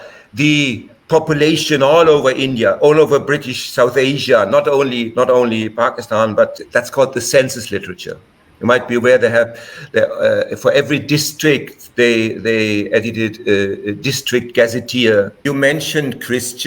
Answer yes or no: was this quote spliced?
yes